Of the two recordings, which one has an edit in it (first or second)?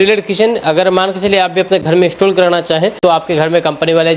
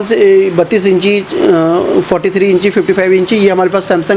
first